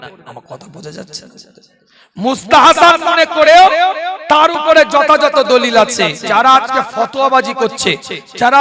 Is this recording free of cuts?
no; 1 cut; at 6.2 s

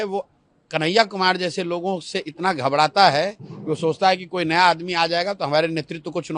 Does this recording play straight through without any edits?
yes; 0 cuts

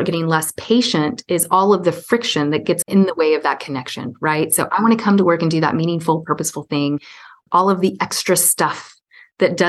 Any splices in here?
yes; 2 cuts; at 2.8 s, 7.4 s

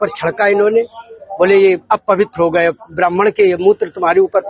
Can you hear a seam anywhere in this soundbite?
no; 0 cuts

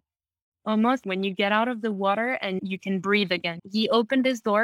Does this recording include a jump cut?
yes; 3 cuts; at 1.0 s, 2.6 s, 3.5 s

